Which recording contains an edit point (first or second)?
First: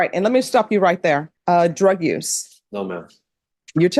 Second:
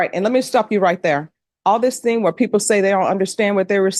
first